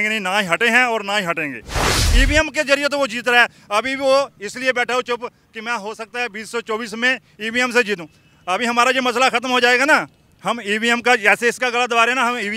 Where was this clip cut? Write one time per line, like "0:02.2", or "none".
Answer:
0:02.1